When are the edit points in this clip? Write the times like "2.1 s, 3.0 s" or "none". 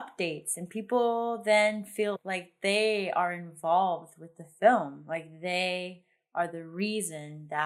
2.1 s